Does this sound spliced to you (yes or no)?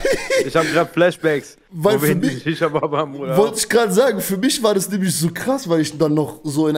no